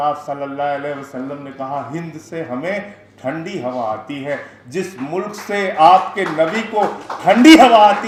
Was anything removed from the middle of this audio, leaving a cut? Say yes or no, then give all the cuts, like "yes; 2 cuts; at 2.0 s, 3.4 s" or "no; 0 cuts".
no; 0 cuts